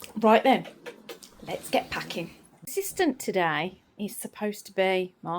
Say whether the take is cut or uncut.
uncut